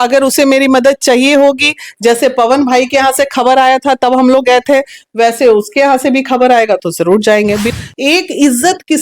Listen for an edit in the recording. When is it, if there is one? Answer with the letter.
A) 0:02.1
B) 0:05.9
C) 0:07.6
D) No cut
C